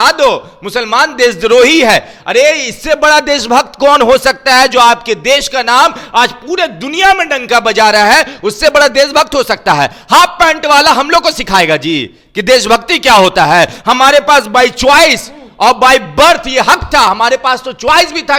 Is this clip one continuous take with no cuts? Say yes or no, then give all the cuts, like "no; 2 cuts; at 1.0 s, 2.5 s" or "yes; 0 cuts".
yes; 0 cuts